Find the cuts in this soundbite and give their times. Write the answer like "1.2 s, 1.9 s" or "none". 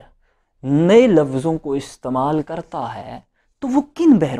none